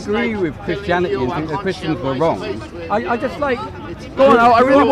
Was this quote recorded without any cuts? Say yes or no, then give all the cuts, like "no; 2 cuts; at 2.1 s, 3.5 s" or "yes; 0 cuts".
yes; 0 cuts